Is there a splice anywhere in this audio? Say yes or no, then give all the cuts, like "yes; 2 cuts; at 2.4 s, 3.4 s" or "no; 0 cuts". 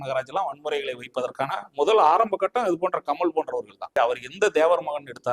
yes; 1 cut; at 3.9 s